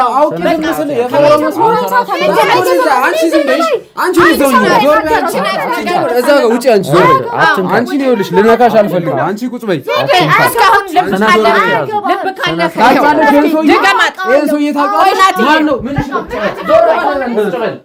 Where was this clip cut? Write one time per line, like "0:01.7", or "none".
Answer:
none